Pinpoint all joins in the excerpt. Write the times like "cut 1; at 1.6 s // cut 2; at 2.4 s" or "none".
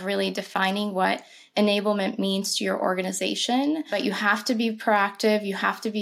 cut 1; at 3.9 s

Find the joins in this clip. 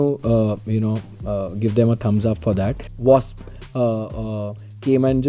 cut 1; at 2.8 s

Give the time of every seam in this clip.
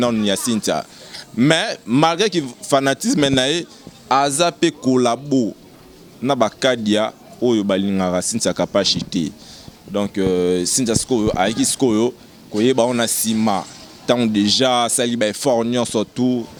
none

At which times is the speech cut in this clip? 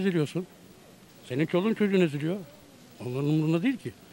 none

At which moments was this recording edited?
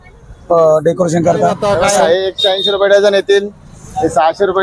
cut 1; at 1.6 s

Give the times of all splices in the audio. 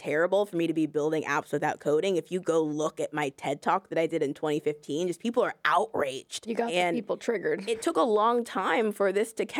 cut 1; at 6.5 s // cut 2; at 7.9 s

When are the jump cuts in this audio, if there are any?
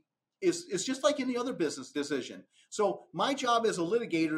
cut 1; at 1.8 s

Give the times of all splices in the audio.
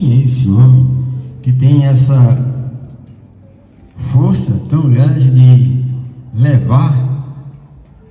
none

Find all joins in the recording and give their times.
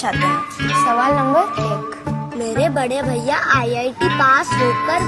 none

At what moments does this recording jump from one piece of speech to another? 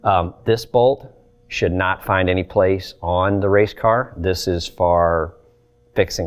none

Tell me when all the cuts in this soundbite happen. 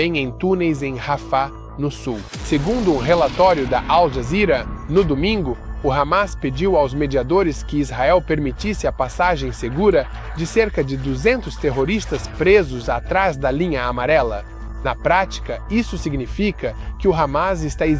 cut 1; at 2.3 s

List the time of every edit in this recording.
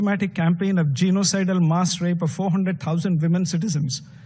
none

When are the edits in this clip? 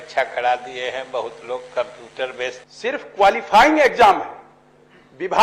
cut 1; at 2.7 s

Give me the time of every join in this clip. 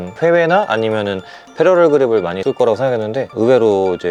none

